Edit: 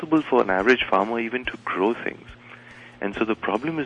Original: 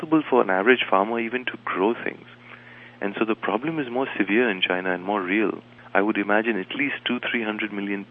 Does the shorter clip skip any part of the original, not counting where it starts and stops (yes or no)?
no